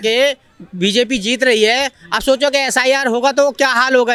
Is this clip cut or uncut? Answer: uncut